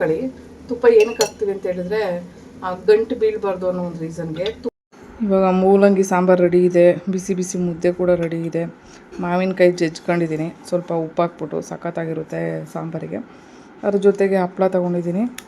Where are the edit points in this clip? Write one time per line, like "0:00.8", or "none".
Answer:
0:04.8

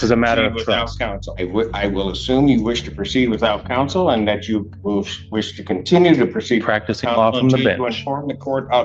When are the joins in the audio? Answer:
none

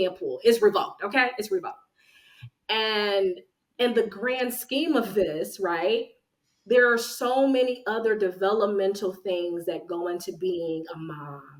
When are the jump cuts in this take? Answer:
none

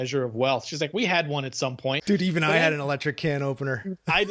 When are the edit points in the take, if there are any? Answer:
0:02.0

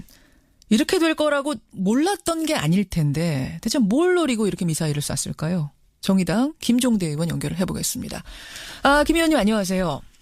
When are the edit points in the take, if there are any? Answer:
0:05.9

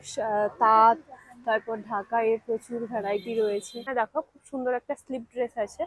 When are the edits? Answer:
0:03.9

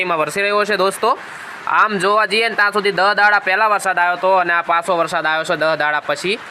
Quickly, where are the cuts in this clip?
none

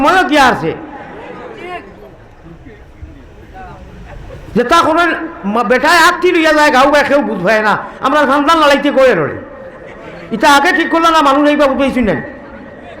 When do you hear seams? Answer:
none

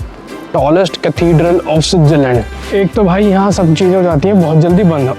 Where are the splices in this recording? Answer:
0:02.6

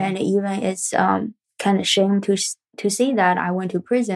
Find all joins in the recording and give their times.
none

